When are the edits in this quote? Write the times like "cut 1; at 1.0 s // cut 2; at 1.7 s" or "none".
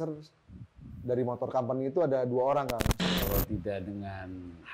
cut 1; at 2.9 s